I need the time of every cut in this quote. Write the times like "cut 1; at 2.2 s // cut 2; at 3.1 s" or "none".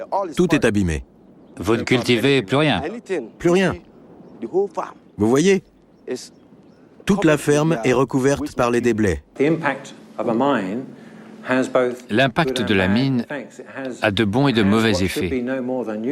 cut 1; at 9.2 s